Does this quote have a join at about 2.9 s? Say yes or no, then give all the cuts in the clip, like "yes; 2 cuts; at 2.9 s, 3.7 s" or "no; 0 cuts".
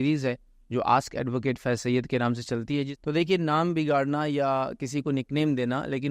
yes; 1 cut; at 2.9 s